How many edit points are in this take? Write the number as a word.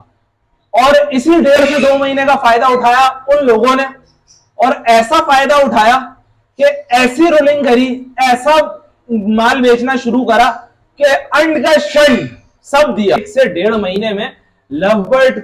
one